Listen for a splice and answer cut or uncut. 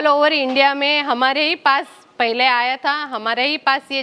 uncut